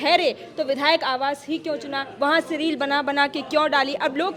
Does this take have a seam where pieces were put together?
no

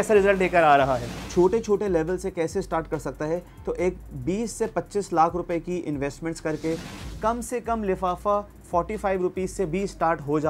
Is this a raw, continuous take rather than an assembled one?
no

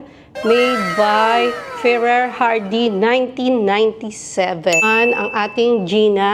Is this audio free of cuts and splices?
no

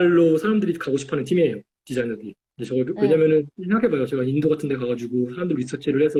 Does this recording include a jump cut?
no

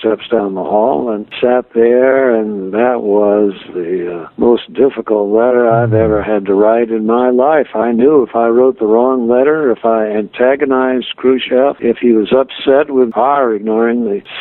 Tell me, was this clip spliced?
yes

